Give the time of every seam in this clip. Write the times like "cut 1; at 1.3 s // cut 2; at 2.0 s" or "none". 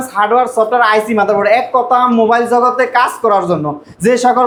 none